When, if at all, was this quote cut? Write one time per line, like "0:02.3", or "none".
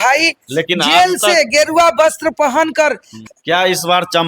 0:03.1